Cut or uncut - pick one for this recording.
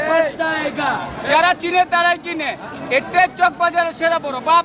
cut